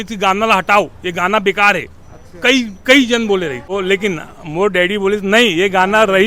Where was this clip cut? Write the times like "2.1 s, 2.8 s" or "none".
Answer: 3.6 s

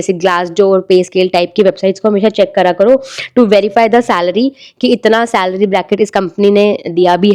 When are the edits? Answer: none

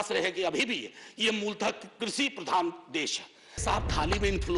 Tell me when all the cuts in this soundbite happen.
3.6 s

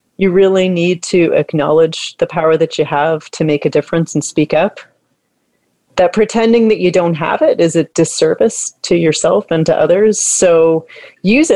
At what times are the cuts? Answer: none

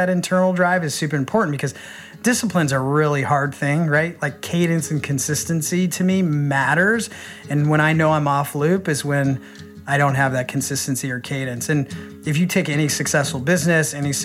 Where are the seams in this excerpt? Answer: 1.3 s

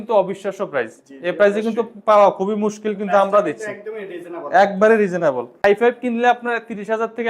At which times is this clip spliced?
5.6 s

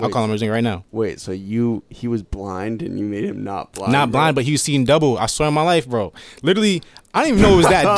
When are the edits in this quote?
none

